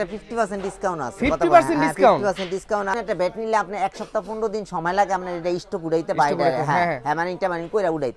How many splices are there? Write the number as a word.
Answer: one